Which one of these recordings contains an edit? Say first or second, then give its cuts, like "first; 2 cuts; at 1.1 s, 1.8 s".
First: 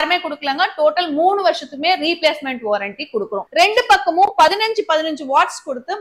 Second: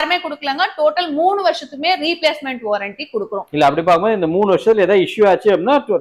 first; 1 cut; at 3.4 s